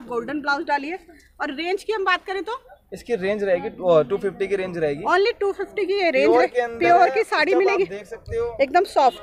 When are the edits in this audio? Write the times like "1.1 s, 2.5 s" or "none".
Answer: none